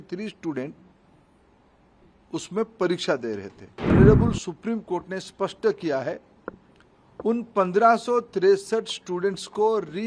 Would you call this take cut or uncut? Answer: cut